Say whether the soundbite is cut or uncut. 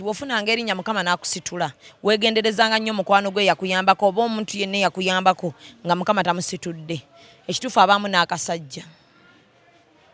uncut